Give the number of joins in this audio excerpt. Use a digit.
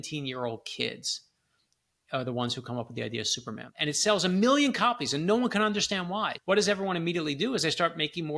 2